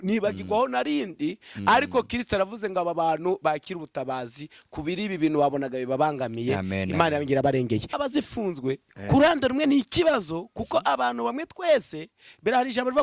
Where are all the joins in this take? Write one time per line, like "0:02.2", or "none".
0:08.0